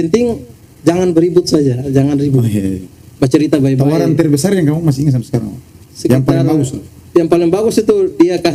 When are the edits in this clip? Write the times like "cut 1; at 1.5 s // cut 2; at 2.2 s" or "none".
none